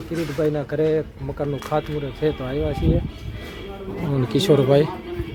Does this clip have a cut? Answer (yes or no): no